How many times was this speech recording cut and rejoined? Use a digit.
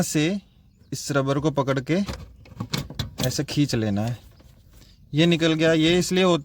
0